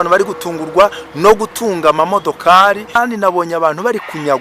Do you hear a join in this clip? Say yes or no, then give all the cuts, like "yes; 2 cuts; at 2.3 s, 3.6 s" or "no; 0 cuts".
yes; 1 cut; at 3.0 s